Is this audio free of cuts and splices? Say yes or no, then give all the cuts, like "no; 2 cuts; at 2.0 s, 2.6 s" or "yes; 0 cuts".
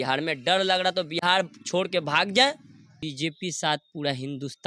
no; 1 cut; at 3.0 s